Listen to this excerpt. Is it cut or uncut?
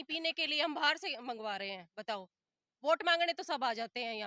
uncut